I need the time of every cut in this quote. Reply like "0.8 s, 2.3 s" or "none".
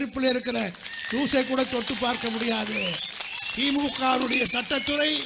none